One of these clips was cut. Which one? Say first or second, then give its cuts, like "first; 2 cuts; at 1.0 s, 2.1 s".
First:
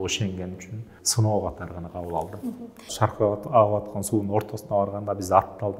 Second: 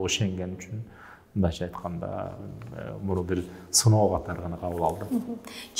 first; 2 cuts; at 1.0 s, 2.9 s